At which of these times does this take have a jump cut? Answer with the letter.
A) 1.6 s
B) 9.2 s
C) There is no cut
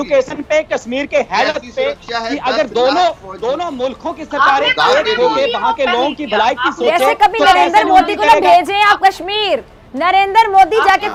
C